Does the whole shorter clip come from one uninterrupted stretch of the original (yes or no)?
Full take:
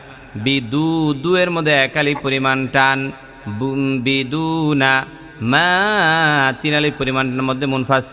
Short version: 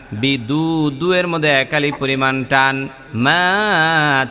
no